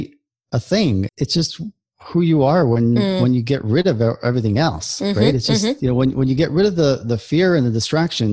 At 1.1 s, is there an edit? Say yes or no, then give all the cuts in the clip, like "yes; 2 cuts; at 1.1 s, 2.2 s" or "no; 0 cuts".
yes; 1 cut; at 1.1 s